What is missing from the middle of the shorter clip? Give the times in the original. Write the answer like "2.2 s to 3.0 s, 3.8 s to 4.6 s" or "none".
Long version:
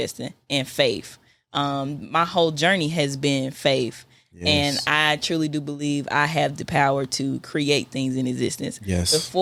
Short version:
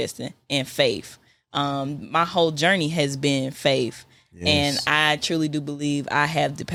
none